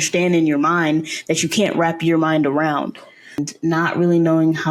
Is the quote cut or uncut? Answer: cut